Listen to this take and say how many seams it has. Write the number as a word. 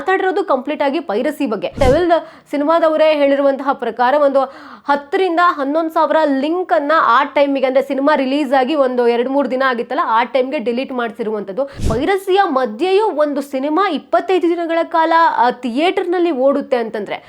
two